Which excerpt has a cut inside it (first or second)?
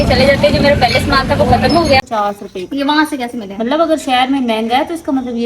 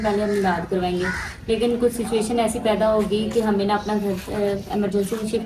first